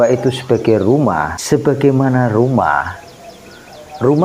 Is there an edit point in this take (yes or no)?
yes